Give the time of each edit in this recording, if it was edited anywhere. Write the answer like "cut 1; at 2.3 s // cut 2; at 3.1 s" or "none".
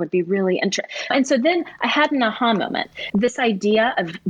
cut 1; at 1.1 s // cut 2; at 3.0 s